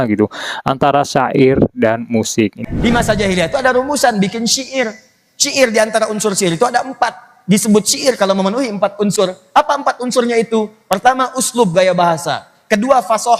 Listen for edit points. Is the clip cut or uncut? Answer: uncut